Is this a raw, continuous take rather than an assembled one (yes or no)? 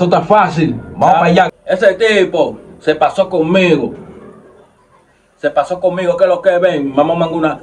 no